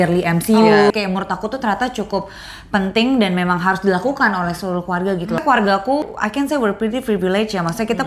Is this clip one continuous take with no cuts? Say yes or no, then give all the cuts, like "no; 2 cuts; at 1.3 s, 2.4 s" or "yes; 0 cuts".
no; 3 cuts; at 0.9 s, 5.4 s, 6.0 s